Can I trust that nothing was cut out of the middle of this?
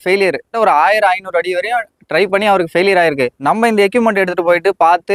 yes; 0 cuts

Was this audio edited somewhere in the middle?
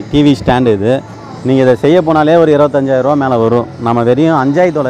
no; 0 cuts

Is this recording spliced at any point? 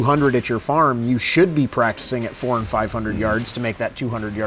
no; 0 cuts

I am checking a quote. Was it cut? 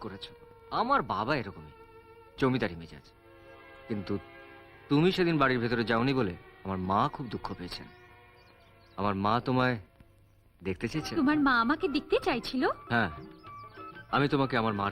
yes; 1 cut; at 11.1 s

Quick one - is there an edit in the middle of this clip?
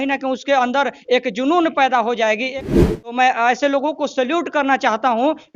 yes; 1 cut; at 2.7 s

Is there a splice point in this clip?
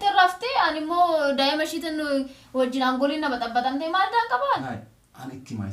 yes; 1 cut; at 4.5 s

